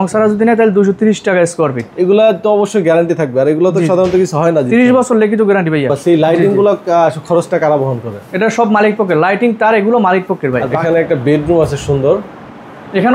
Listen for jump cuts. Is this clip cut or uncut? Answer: cut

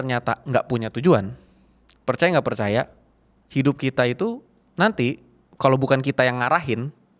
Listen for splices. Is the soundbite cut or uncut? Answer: uncut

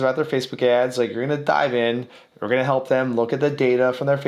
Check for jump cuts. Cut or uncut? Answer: uncut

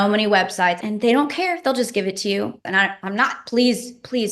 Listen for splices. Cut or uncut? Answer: cut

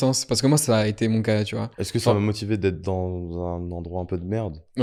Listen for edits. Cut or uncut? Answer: uncut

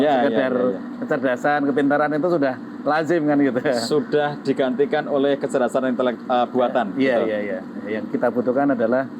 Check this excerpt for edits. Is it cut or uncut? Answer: uncut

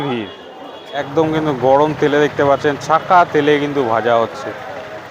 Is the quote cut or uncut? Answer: cut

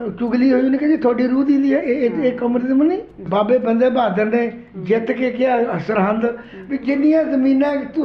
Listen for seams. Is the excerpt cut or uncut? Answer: cut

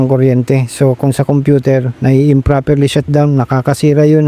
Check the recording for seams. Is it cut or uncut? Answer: uncut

